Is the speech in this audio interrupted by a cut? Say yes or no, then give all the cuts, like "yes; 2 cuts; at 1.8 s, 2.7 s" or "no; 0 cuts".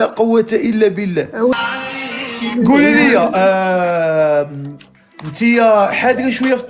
yes; 1 cut; at 1.5 s